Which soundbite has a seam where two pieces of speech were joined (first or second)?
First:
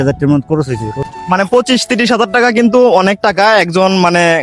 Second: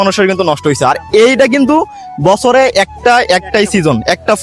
first